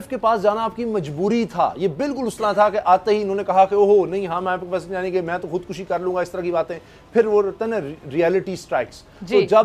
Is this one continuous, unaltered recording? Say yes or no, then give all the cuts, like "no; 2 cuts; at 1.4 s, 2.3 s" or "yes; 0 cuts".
yes; 0 cuts